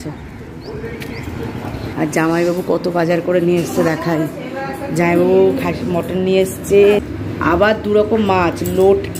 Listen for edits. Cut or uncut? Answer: cut